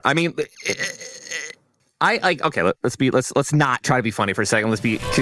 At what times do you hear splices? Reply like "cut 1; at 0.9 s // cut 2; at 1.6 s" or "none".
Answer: cut 1; at 1.8 s